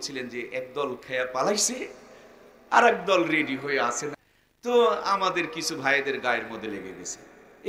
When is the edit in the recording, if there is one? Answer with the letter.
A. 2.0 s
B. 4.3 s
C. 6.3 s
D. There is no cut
B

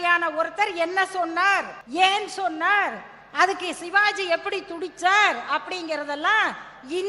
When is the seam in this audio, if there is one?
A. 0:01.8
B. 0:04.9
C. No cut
A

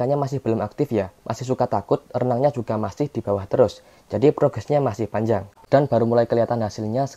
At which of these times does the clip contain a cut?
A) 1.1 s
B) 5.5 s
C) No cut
B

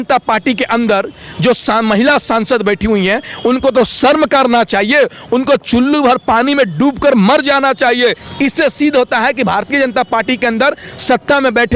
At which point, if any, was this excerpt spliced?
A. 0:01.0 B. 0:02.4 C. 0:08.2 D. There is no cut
C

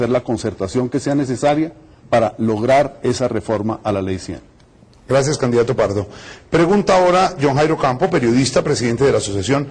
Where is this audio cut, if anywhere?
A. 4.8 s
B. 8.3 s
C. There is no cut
B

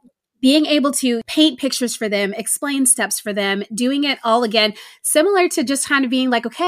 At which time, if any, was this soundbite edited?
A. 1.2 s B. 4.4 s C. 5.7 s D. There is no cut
A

